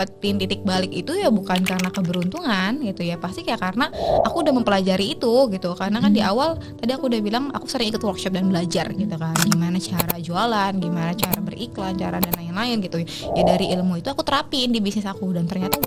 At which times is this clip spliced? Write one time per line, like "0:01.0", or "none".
none